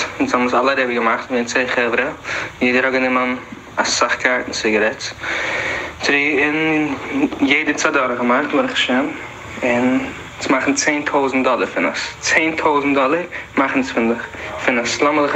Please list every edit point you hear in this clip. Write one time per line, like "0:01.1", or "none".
none